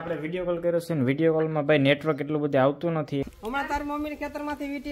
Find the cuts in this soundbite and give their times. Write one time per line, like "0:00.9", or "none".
0:03.2